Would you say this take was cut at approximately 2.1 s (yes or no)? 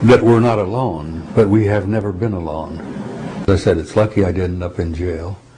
no